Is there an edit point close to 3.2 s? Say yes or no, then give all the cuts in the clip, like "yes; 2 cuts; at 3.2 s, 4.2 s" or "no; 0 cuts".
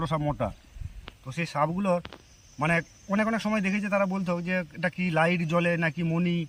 no; 0 cuts